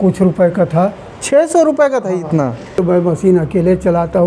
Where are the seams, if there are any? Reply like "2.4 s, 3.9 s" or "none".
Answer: 2.8 s